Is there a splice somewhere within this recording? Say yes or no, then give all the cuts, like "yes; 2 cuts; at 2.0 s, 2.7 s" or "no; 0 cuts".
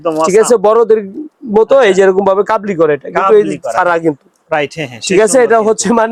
no; 0 cuts